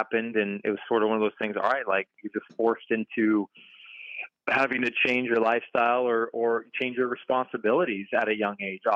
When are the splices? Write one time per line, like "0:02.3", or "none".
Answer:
none